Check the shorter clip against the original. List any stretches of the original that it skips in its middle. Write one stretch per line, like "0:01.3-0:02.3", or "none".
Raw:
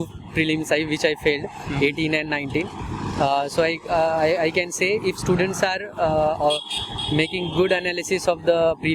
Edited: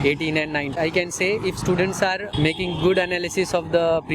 0:02.5-0:04.4
0:05.8-0:07.0